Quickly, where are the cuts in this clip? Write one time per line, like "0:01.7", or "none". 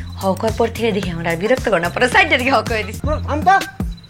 0:02.9